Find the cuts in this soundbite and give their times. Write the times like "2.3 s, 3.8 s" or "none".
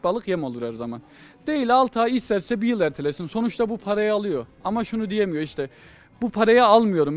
none